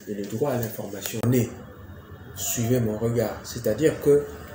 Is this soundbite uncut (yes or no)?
no